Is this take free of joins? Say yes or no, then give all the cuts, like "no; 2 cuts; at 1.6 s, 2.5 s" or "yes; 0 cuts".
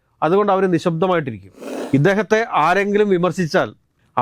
no; 1 cut; at 1.7 s